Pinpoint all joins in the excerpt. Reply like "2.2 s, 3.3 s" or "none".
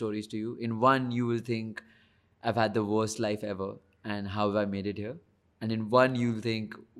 none